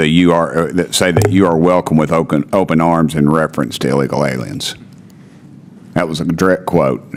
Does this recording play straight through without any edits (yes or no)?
yes